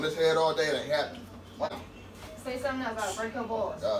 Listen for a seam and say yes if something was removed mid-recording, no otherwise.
yes